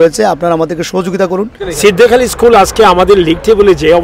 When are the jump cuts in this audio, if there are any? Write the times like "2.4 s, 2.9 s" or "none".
1.6 s